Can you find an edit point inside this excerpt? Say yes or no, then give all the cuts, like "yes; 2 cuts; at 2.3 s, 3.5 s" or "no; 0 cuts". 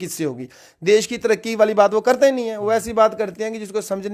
no; 0 cuts